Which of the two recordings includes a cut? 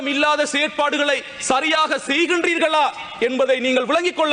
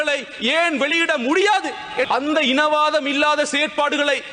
second; 1 cut; at 2.1 s

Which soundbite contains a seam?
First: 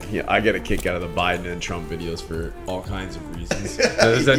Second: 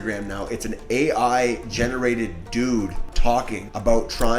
second; 1 cut; at 3.3 s

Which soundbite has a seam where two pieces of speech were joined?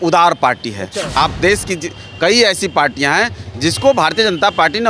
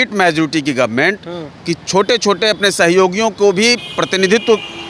first; 1 cut; at 1.1 s

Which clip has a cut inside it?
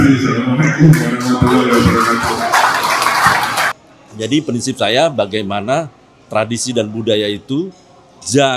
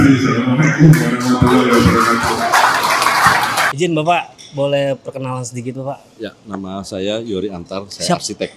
first; 1 cut; at 3.7 s

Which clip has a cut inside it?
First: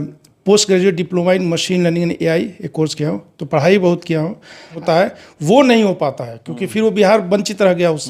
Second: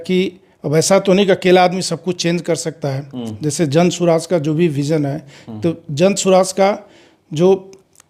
first; 1 cut; at 4.7 s

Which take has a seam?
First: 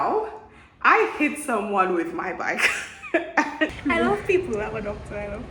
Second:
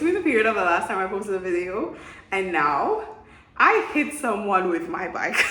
first; 1 cut; at 3.7 s

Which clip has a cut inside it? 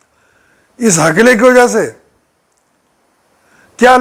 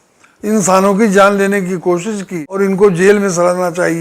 second; 1 cut; at 2.5 s

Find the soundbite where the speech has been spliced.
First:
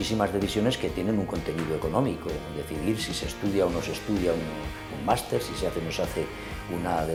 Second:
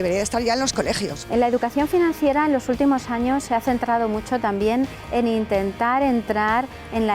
second; 1 cut; at 1.1 s

